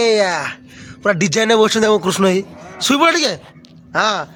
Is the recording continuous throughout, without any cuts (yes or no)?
yes